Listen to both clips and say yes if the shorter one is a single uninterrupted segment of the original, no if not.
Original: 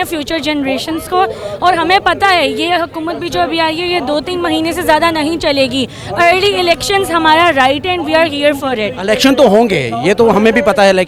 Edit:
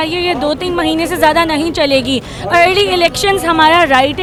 yes